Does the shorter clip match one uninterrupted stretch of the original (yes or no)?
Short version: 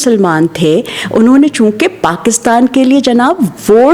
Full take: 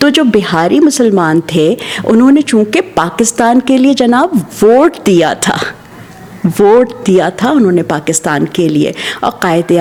yes